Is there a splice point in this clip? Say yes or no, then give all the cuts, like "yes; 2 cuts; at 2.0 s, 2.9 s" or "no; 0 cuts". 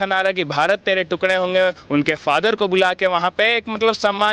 no; 0 cuts